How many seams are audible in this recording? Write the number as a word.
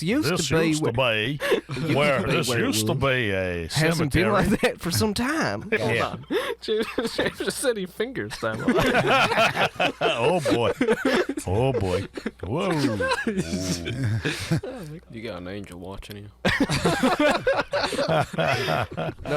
two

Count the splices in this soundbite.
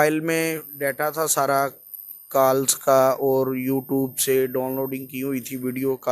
zero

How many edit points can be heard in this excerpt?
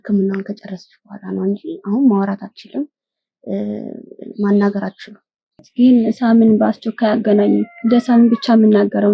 one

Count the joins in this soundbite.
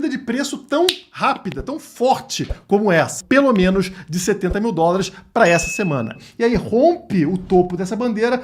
two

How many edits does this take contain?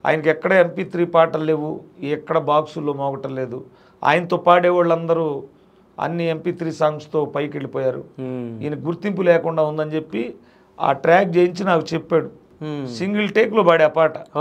one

